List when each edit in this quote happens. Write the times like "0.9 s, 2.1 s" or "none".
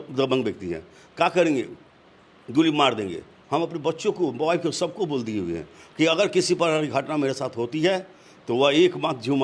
none